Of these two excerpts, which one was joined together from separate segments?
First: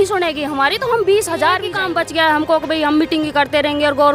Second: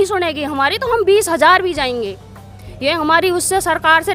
first; 1 cut; at 1.9 s

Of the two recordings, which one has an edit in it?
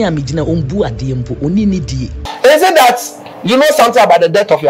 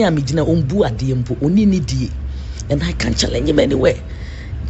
first; 1 cut; at 2.2 s

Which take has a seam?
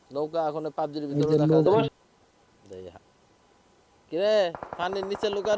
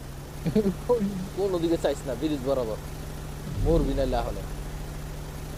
first; 1 cut; at 1.9 s

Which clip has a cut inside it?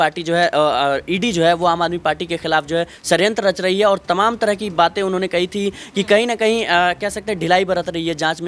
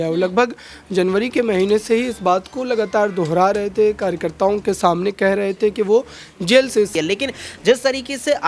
second; 1 cut; at 6.9 s

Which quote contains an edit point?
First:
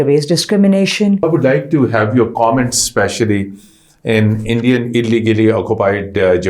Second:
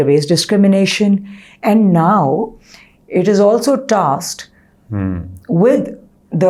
first; 1 cut; at 1.2 s

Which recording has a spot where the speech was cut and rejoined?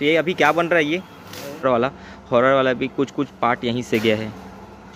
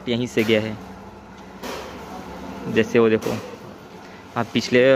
first; 1 cut; at 1.6 s

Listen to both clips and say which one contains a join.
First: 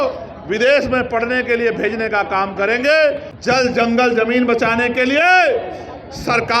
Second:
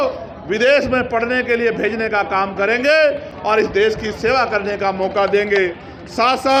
first; 1 cut; at 3.3 s

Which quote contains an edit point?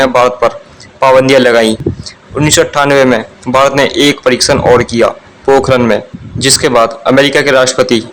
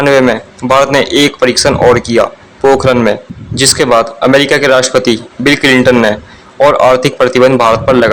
first; 1 cut; at 1.9 s

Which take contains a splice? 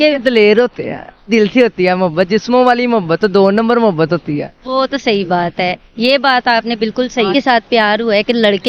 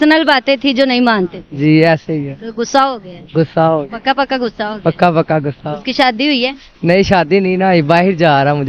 first; 2 cuts; at 1.3 s, 7.3 s

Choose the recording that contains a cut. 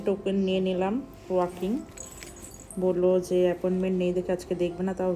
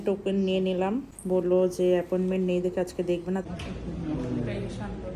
second; 2 cuts; at 1.1 s, 3.4 s

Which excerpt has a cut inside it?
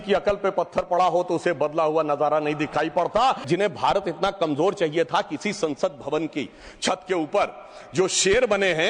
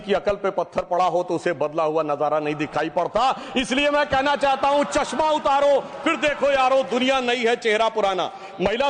first; 1 cut; at 3.4 s

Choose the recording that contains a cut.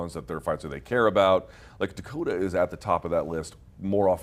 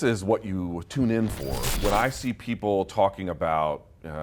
second; 1 cut; at 1.6 s

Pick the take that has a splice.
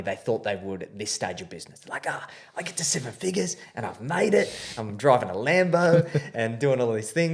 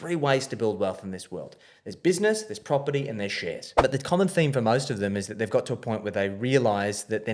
second; 1 cut; at 3.6 s

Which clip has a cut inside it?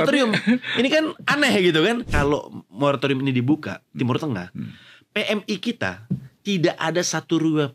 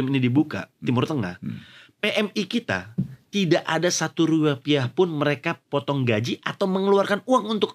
first; 1 cut; at 2.1 s

